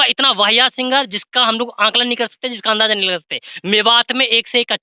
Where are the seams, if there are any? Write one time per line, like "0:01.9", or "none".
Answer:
none